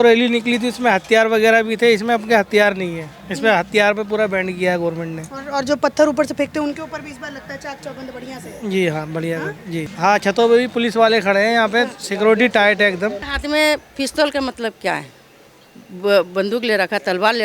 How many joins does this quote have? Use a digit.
2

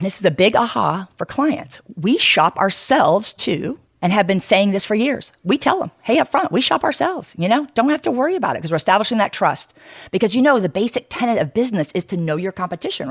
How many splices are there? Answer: 0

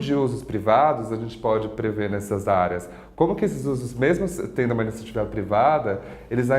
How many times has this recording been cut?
0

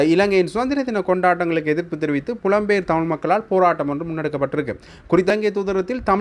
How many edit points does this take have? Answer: 1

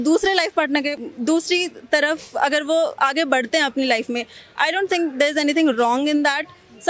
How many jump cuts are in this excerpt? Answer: 1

